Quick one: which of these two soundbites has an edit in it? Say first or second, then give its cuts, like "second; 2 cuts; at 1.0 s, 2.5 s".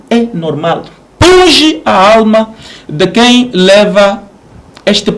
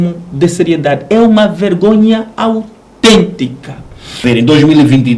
second; 1 cut; at 4.2 s